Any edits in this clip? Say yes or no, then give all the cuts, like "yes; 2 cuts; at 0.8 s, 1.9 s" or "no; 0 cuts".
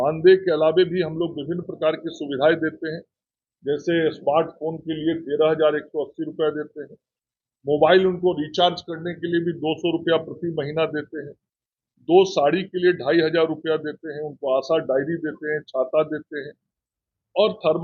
no; 0 cuts